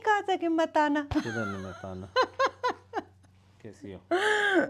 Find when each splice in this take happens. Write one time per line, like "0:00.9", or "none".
none